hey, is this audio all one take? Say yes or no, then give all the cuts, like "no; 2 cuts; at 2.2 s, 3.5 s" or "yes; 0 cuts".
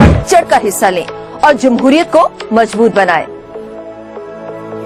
yes; 0 cuts